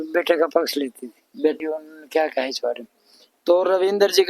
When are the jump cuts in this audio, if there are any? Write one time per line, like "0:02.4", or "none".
0:01.6